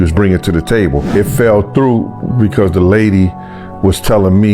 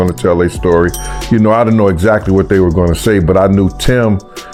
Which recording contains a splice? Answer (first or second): first